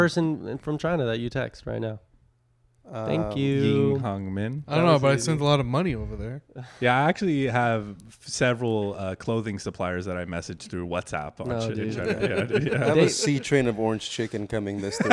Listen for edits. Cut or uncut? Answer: uncut